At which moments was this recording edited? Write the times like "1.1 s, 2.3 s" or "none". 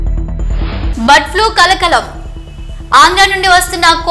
none